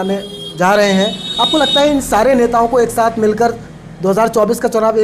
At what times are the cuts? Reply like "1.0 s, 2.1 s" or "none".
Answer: none